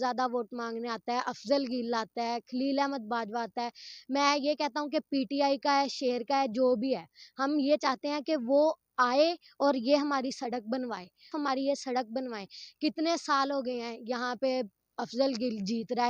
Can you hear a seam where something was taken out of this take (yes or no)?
yes